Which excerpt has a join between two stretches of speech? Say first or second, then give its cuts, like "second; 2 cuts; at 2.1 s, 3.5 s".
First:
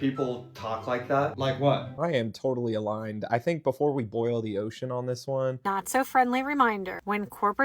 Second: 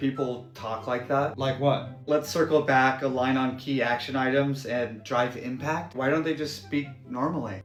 first; 2 cuts; at 1.9 s, 5.6 s